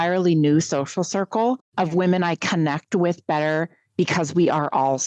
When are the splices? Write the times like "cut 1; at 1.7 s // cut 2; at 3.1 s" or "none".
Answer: cut 1; at 1.7 s